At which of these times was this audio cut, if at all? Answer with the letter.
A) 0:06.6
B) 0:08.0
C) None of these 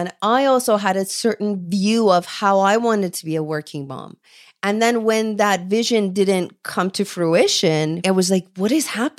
B